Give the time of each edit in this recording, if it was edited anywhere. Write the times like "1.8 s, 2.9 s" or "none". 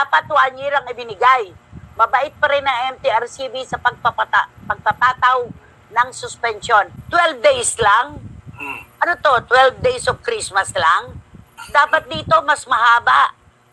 7.0 s